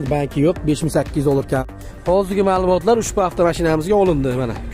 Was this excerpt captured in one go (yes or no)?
no